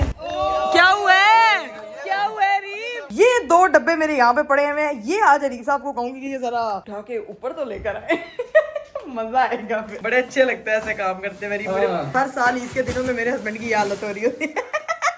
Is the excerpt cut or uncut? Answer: cut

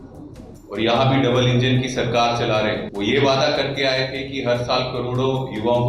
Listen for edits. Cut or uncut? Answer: cut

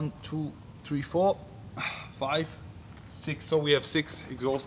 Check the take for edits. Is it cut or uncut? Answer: uncut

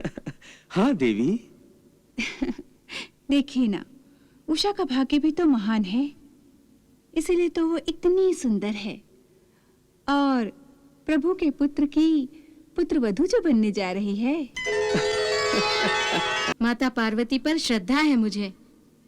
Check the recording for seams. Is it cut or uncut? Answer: cut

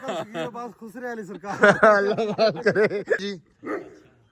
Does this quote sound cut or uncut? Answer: cut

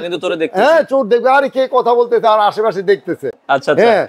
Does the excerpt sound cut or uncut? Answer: uncut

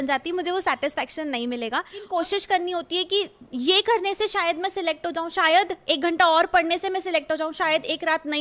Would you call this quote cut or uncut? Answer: cut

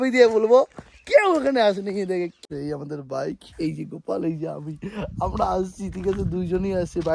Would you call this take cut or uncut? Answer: cut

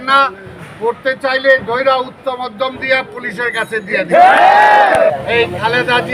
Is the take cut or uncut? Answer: cut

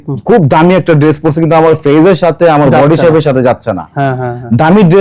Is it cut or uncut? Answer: uncut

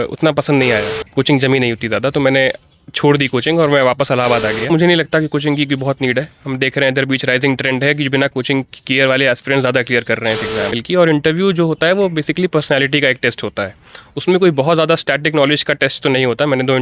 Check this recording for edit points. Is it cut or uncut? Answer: cut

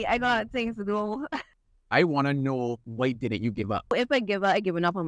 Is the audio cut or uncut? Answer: cut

